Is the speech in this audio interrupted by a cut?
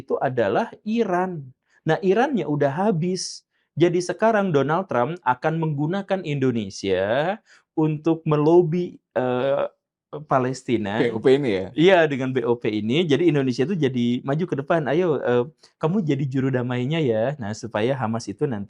no; 0 cuts

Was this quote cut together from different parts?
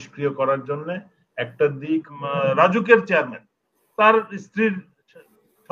yes; 1 cut; at 2.1 s

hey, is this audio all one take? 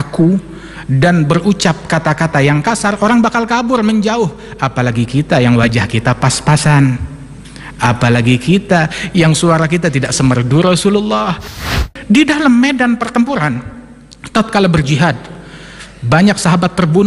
no; 1 cut; at 11.5 s

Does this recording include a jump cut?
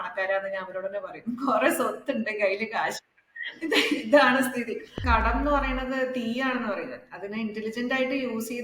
yes; 1 cut; at 5.0 s

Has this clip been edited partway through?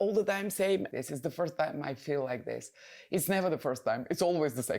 yes; 1 cut; at 0.9 s

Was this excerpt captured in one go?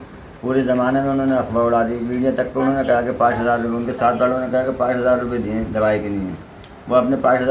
yes; 0 cuts

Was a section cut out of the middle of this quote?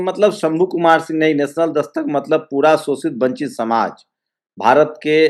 no; 0 cuts

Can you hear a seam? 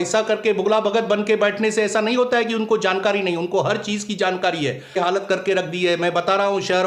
yes; 1 cut; at 5.0 s

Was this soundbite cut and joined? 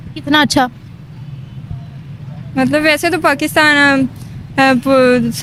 no; 0 cuts

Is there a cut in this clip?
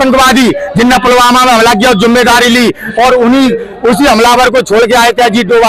no; 0 cuts

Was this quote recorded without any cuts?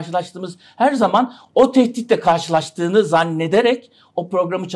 yes; 0 cuts

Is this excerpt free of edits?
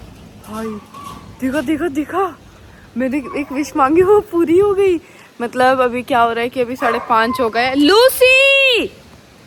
yes; 0 cuts

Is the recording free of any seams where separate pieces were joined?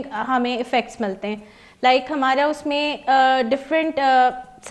yes; 0 cuts

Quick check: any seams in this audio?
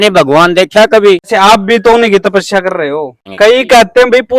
yes; 2 cuts; at 1.3 s, 3.2 s

